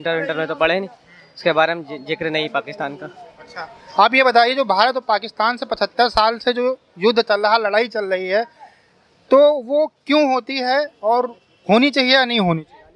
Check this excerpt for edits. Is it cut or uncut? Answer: uncut